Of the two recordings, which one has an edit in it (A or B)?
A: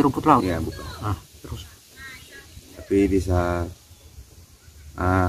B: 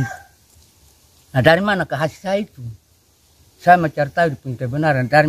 A